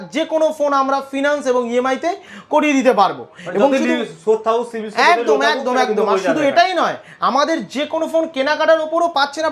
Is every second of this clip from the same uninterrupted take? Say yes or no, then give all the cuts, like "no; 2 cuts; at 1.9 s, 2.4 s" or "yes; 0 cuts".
yes; 0 cuts